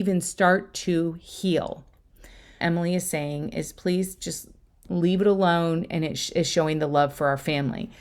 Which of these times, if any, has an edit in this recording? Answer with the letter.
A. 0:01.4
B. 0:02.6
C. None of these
B